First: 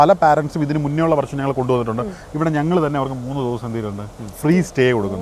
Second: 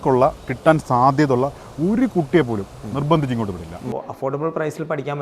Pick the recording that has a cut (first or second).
second